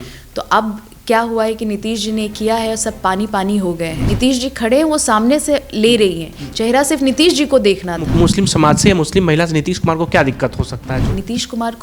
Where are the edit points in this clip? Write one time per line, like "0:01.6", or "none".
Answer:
0:04.0
0:08.1
0:10.9